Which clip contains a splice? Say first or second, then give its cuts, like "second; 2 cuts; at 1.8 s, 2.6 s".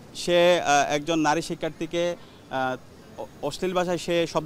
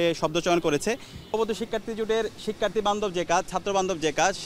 second; 1 cut; at 1.3 s